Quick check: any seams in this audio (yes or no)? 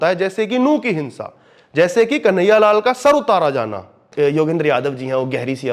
yes